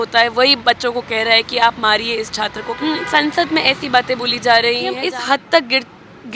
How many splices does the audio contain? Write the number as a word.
two